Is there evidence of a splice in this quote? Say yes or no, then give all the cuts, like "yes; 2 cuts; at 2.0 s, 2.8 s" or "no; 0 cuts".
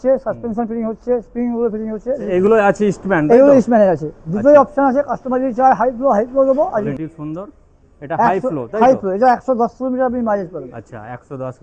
yes; 2 cuts; at 2.2 s, 6.9 s